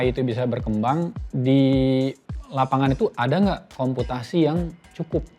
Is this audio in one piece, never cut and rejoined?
no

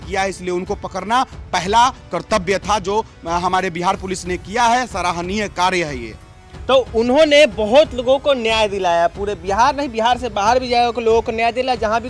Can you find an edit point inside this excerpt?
no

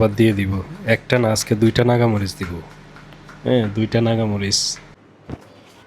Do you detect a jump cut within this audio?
yes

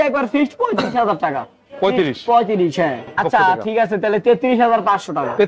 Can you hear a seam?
yes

